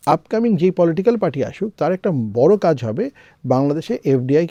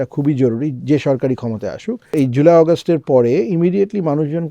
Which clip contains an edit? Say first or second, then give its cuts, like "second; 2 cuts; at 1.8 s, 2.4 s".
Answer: second; 1 cut; at 2.1 s